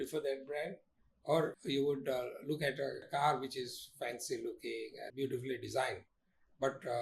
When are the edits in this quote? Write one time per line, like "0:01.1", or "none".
0:01.6
0:03.0
0:05.1